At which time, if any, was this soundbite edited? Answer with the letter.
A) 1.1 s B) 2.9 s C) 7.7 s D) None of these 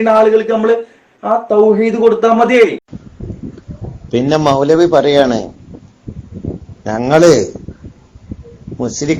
B